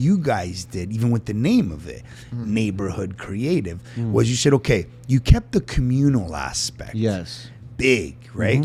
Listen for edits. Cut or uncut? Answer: uncut